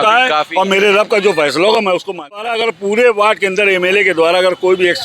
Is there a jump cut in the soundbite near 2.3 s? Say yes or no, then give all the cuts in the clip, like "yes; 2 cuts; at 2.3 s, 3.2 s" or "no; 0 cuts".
yes; 1 cut; at 2.3 s